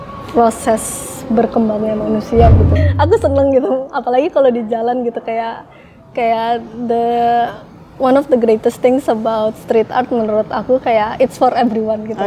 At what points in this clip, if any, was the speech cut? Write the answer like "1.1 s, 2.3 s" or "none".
2.8 s